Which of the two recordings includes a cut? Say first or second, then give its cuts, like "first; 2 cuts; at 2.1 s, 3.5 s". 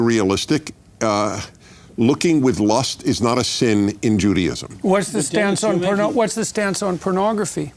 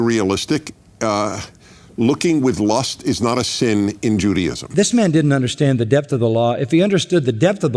second; 1 cut; at 4.7 s